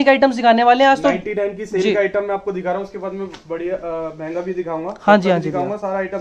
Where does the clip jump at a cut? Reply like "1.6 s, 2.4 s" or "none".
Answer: none